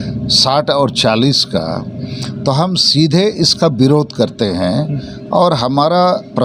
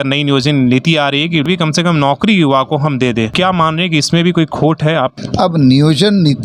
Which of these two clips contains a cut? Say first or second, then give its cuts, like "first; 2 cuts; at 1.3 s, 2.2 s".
second; 3 cuts; at 1.5 s, 3.3 s, 5.2 s